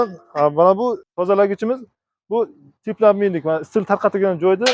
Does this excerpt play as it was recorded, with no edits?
no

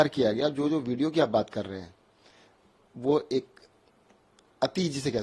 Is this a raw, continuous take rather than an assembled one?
yes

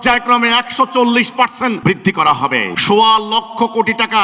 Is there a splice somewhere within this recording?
yes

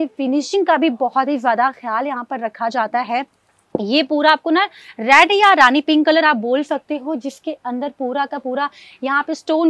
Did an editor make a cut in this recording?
yes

